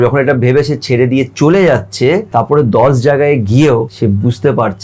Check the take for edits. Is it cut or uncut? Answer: cut